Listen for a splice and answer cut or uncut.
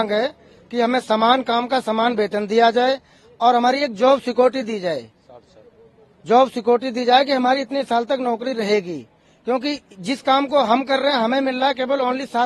uncut